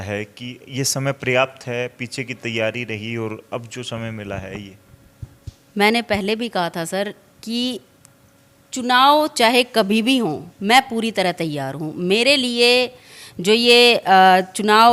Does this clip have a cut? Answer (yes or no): no